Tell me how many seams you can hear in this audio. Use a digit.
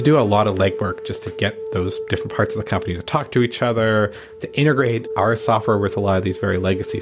0